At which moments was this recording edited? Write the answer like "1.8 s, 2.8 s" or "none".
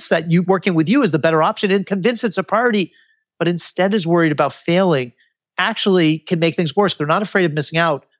7.0 s